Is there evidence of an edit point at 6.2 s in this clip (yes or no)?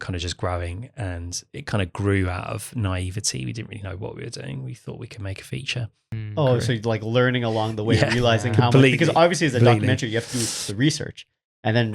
yes